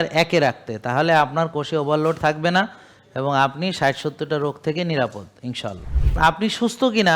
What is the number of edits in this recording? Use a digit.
1